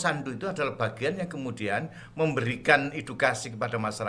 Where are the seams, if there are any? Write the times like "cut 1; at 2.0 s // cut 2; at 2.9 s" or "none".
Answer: none